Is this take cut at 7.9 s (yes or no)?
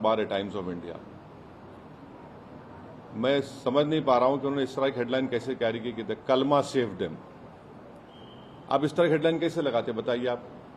no